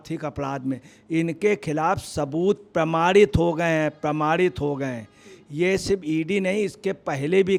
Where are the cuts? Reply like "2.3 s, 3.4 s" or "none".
none